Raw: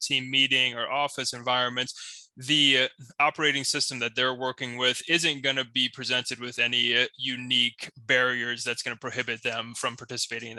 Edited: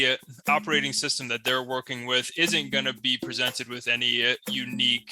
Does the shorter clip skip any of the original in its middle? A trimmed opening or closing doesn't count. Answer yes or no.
no